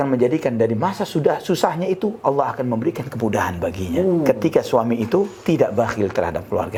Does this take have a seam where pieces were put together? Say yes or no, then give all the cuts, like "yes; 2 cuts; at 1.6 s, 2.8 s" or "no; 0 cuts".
no; 0 cuts